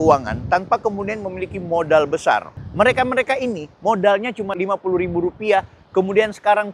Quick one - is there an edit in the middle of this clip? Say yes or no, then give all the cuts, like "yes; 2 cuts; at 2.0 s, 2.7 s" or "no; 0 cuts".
yes; 2 cuts; at 2.6 s, 4.5 s